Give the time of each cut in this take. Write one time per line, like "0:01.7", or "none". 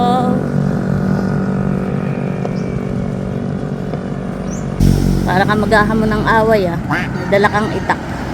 0:04.8